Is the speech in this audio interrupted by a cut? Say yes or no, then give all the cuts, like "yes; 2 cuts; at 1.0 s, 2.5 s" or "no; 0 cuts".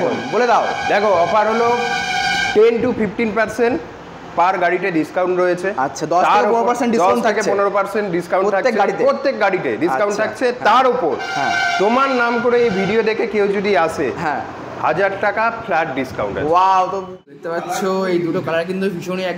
yes; 1 cut; at 17.3 s